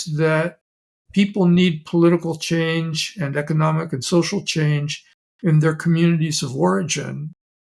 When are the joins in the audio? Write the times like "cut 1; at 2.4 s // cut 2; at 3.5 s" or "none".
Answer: none